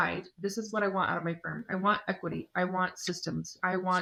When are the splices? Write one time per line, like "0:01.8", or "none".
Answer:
none